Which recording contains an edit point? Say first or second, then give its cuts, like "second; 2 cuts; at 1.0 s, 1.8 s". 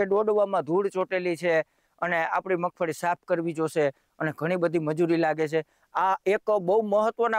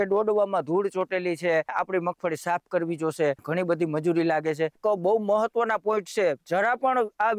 second; 3 cuts; at 1.7 s, 3.4 s, 4.8 s